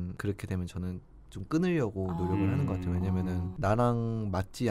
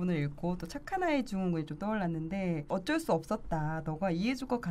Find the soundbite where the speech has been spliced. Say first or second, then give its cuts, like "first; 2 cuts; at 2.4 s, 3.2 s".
second; 1 cut; at 2.7 s